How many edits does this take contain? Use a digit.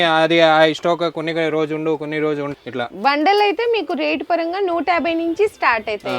1